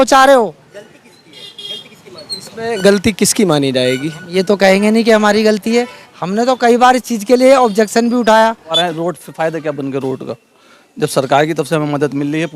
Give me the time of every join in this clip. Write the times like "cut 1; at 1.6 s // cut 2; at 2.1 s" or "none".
cut 1; at 8.7 s